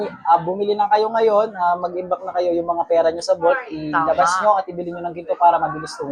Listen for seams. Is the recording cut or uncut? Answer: uncut